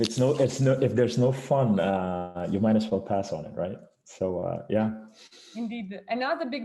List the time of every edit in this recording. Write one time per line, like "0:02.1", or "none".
none